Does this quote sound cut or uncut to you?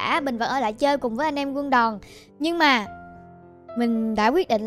cut